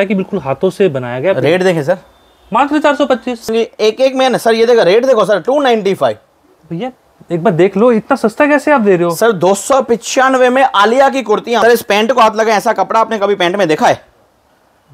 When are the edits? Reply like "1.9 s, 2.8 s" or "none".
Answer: 3.5 s, 11.6 s

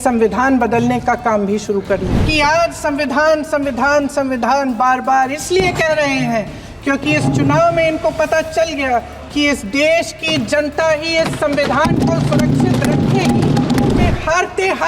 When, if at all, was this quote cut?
2.2 s, 14.1 s

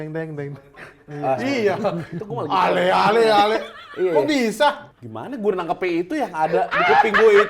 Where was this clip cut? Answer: 4.9 s

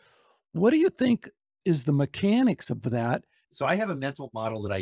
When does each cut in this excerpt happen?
1.5 s, 3.4 s

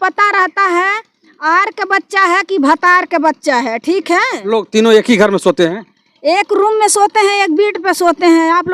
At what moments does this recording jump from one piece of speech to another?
4.5 s

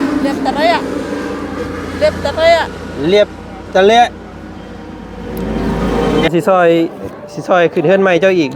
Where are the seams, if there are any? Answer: 6.3 s

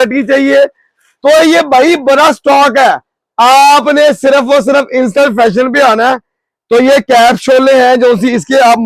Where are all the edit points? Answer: none

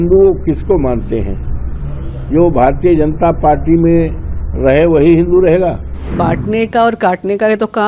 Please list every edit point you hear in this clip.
6.1 s

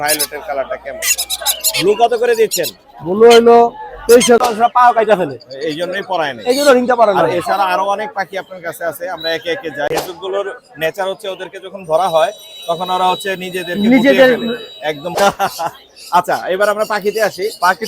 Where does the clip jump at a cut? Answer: 4.4 s, 9.9 s, 15.2 s

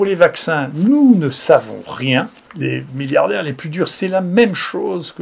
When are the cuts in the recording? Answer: 2.4 s

